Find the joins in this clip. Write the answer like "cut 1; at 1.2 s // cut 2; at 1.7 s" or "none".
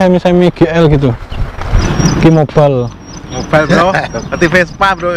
cut 1; at 1.9 s